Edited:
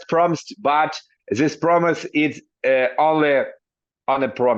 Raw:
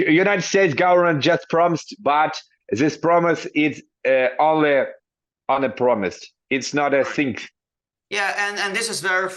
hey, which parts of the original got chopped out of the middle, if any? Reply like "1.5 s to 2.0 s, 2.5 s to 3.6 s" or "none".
none